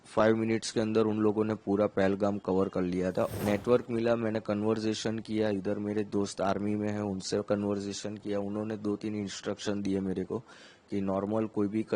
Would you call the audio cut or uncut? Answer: cut